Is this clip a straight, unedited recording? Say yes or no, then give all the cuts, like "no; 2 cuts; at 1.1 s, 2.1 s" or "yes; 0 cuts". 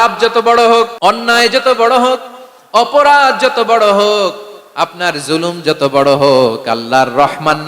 no; 1 cut; at 0.9 s